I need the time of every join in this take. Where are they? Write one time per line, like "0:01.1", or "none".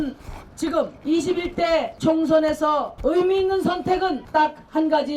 0:01.0
0:01.9
0:02.9
0:04.2